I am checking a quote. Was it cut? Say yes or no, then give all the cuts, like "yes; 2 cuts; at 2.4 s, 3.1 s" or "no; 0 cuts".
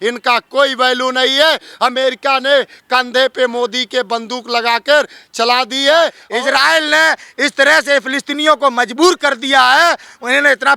yes; 1 cut; at 6.2 s